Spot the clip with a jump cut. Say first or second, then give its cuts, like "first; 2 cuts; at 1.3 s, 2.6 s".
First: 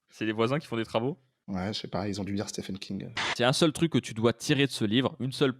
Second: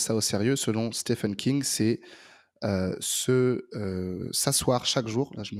first; 1 cut; at 3.3 s